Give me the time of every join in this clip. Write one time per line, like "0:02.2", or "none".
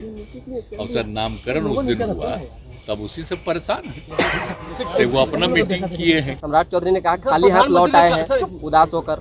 0:06.4